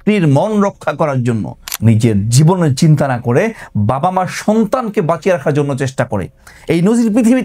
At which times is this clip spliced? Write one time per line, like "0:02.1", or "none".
0:01.6